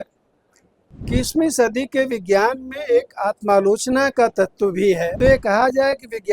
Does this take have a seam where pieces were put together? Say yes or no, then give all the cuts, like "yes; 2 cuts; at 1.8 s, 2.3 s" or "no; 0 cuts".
yes; 2 cuts; at 1.1 s, 5.1 s